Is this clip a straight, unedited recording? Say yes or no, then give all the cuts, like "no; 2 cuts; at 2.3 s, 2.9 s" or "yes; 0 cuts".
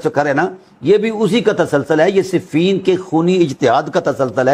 yes; 0 cuts